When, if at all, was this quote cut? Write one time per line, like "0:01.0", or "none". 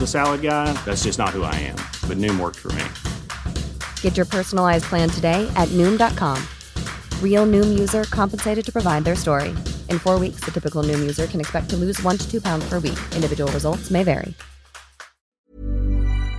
0:15.3